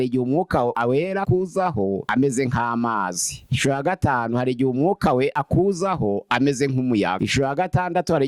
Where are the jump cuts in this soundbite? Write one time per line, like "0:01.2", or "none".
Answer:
0:01.0